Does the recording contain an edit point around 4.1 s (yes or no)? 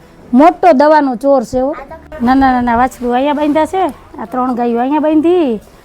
no